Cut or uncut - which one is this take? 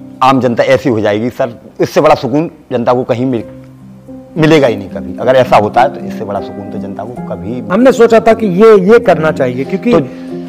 uncut